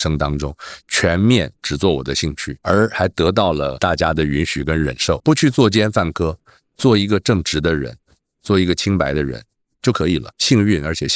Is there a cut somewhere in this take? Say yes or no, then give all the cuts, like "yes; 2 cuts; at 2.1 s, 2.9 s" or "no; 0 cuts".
yes; 3 cuts; at 3.8 s, 5.2 s, 10.3 s